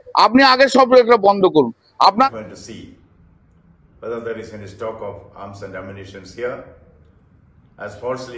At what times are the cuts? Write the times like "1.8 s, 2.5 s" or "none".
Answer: 2.3 s

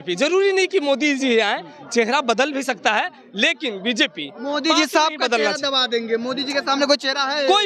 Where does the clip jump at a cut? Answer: none

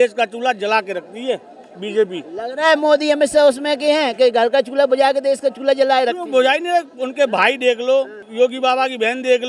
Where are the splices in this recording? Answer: none

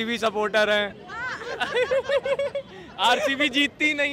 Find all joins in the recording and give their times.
none

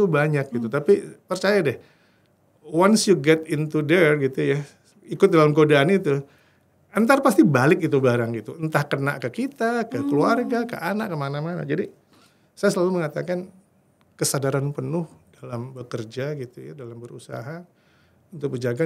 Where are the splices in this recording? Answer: none

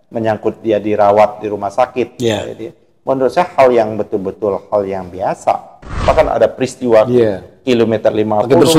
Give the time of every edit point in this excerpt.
6.0 s

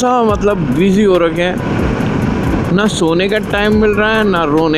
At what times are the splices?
none

